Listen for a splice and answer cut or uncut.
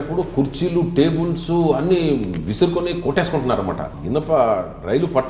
cut